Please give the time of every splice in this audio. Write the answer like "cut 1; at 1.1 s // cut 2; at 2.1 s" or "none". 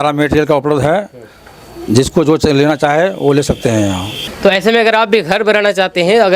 cut 1; at 4.1 s

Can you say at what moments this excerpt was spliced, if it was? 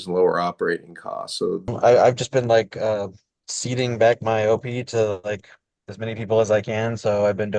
cut 1; at 1.7 s

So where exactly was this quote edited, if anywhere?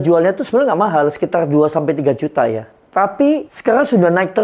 cut 1; at 3.5 s

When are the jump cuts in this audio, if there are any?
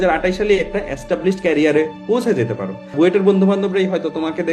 cut 1; at 2.9 s

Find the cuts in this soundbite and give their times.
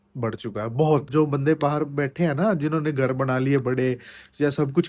cut 1; at 1.1 s

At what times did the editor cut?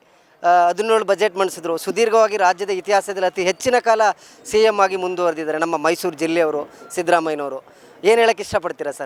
none

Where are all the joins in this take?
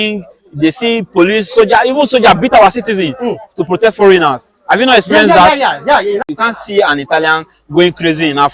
cut 1; at 6.2 s

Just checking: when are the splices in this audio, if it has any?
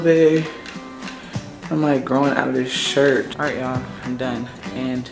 cut 1; at 3.3 s

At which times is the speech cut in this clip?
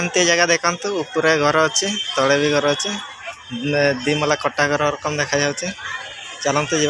none

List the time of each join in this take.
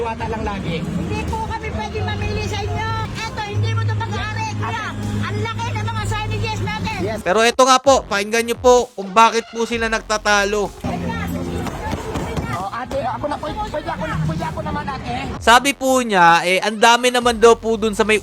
cut 1; at 3.0 s // cut 2; at 7.2 s // cut 3; at 15.4 s

